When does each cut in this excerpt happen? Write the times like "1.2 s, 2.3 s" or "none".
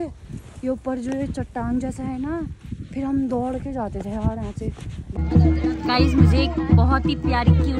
5.0 s